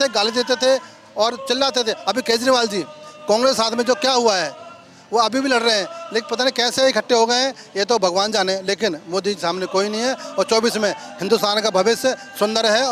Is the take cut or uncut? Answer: uncut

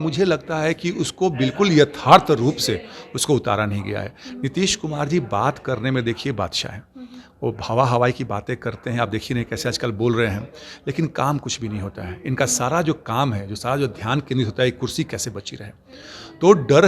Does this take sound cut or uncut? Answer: uncut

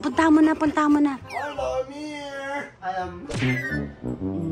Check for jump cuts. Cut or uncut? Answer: uncut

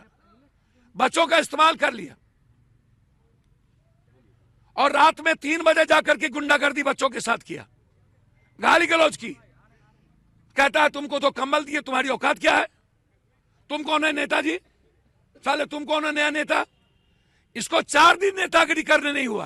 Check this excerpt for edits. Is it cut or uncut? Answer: uncut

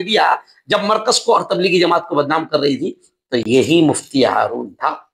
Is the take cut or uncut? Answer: uncut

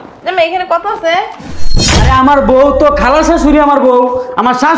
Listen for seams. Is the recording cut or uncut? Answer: cut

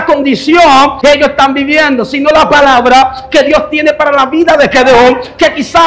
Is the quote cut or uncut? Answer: cut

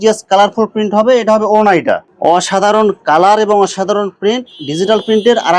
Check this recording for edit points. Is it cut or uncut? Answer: cut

